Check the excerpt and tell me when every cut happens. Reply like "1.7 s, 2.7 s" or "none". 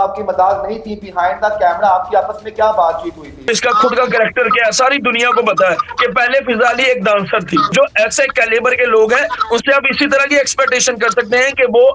3.4 s, 7.7 s